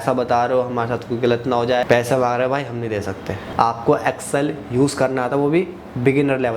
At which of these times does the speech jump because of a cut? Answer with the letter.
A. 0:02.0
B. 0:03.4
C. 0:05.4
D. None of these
B